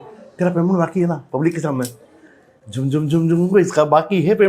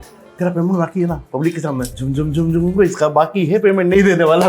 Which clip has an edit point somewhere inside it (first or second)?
second